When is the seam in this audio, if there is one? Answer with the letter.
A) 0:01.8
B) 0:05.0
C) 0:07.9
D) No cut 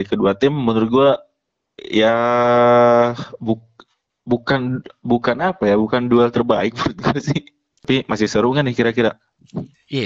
C